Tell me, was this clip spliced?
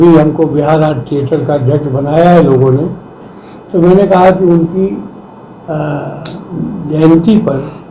yes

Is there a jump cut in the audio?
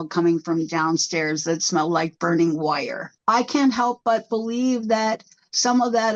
yes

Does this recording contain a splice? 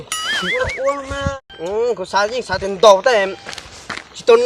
yes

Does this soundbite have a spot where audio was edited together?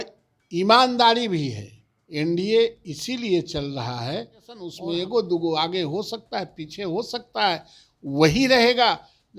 yes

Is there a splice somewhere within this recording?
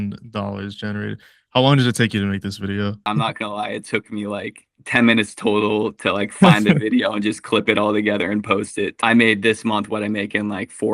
yes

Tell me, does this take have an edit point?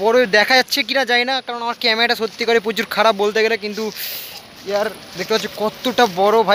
no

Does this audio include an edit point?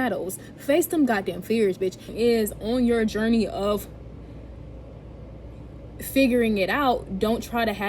yes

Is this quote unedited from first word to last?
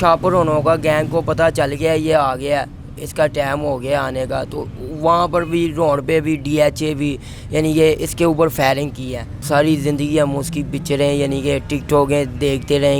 no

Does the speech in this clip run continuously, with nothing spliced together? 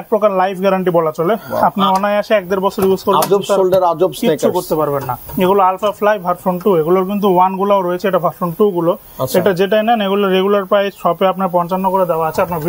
yes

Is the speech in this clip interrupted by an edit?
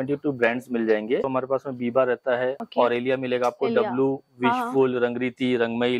yes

